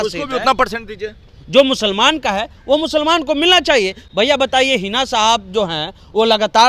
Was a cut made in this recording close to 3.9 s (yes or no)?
no